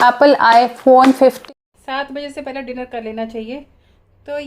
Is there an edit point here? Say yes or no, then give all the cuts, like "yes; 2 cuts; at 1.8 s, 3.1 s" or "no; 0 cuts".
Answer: yes; 1 cut; at 1.4 s